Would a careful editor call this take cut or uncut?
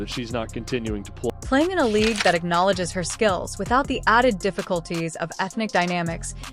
uncut